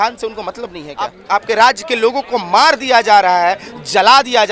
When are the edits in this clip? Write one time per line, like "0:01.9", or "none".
0:01.2